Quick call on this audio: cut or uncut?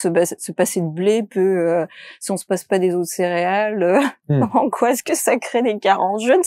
uncut